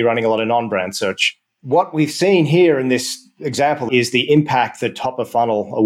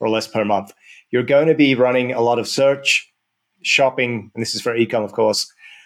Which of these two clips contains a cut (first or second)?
first